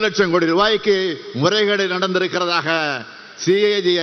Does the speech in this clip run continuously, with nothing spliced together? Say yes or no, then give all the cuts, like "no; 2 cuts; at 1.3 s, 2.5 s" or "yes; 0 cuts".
yes; 0 cuts